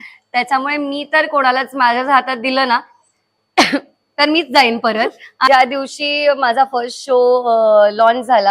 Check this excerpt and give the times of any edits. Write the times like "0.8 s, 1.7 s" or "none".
5.5 s